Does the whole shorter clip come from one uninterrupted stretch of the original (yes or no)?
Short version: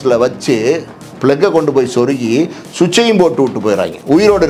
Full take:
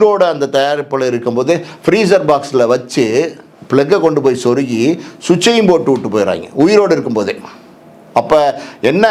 yes